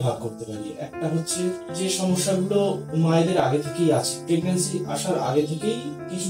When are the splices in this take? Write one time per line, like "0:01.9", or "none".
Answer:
0:01.7